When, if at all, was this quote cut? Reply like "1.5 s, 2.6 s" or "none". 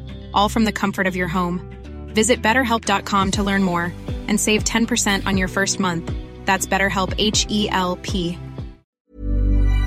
8.9 s